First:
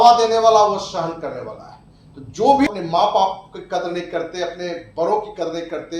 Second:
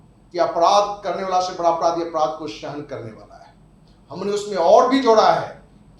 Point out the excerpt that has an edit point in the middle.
first; 1 cut; at 2.7 s

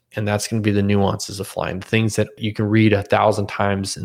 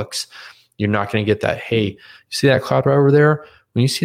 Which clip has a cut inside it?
first; 1 cut; at 2.4 s

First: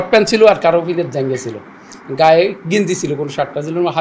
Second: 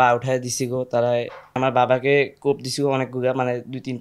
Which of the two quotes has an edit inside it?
second; 1 cut; at 1.6 s

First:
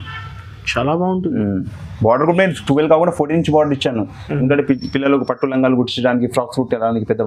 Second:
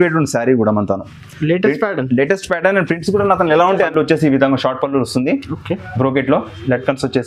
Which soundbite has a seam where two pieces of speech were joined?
second; 1 cut; at 3.9 s

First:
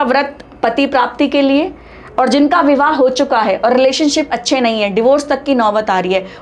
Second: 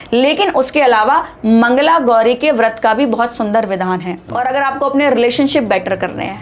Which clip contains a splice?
second; 1 cut; at 4.2 s

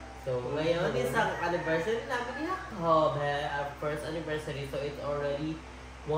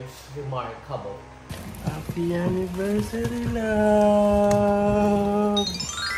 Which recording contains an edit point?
second; 1 cut; at 1.4 s

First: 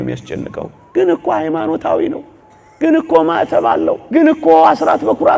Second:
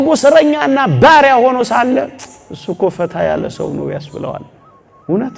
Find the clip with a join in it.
first; 1 cut; at 4.0 s

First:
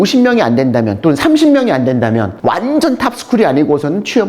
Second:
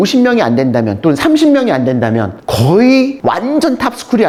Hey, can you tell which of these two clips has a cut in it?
first; 1 cut; at 2.3 s

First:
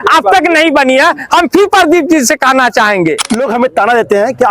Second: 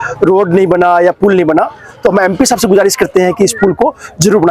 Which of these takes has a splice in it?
first; 1 cut; at 3.2 s

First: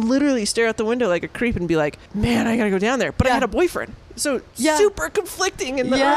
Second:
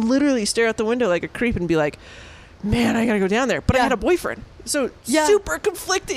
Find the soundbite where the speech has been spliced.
first; 1 cut; at 2.0 s

